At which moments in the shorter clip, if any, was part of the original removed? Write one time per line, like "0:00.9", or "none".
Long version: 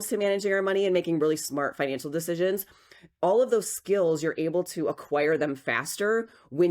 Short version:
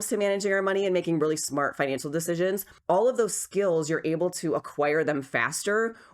0:02.7